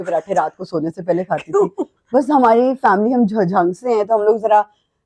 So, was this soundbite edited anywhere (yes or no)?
no